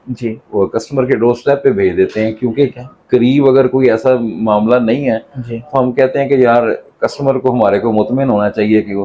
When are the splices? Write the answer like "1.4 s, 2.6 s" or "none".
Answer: none